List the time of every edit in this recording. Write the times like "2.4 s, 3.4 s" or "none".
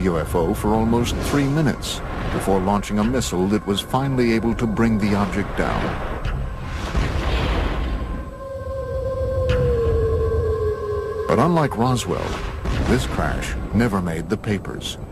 none